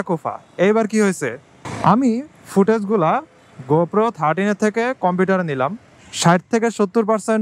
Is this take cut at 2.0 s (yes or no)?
no